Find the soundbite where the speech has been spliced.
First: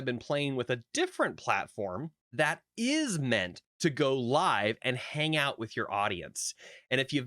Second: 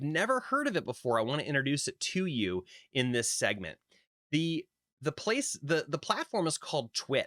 first; 2 cuts; at 2.2 s, 3.6 s

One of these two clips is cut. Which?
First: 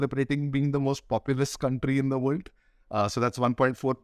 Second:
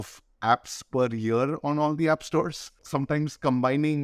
second; 1 cut; at 2.8 s

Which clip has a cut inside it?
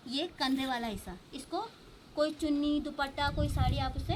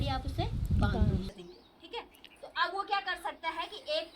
second; 1 cut; at 1.4 s

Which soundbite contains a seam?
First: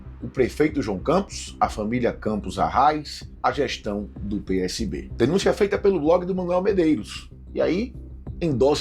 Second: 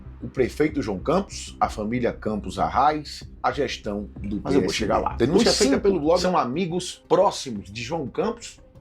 second; 1 cut; at 6.2 s

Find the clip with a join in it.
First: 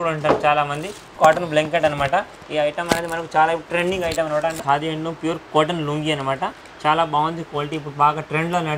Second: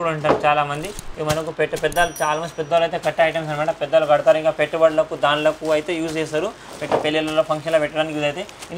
first; 2 cuts; at 1.0 s, 4.6 s

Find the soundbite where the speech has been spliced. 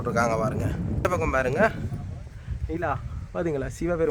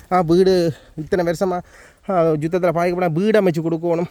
first; 1 cut; at 1.0 s

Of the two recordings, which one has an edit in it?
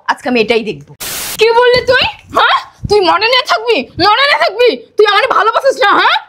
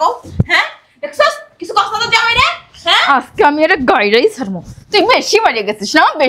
first; 1 cut; at 1.2 s

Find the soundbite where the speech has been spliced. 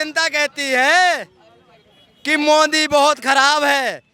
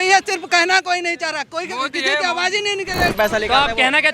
second; 1 cut; at 3.1 s

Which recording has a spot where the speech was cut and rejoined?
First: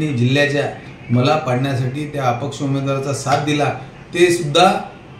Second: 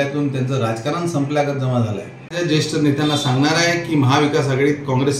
second; 1 cut; at 2.2 s

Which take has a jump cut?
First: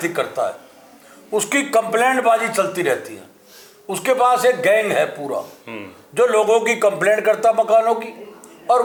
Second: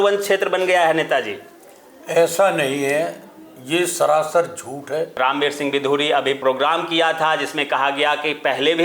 second; 2 cuts; at 5.1 s, 6.4 s

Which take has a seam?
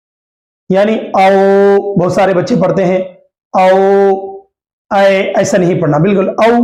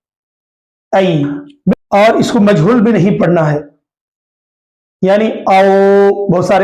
second; 1 cut; at 1.7 s

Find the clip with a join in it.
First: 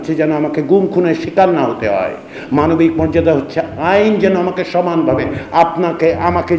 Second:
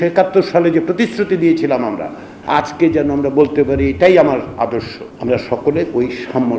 second; 2 cuts; at 2.3 s, 5.0 s

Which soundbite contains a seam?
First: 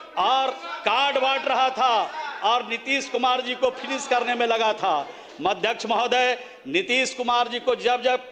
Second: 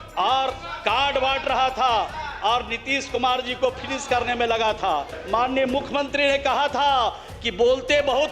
second; 1 cut; at 5.2 s

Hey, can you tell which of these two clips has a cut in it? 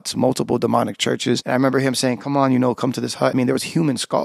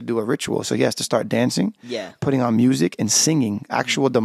first; 2 cuts; at 1.4 s, 3.3 s

